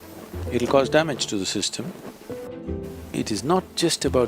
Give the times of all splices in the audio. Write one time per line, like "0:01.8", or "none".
0:02.5